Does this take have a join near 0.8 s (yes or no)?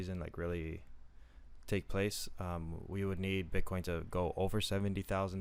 no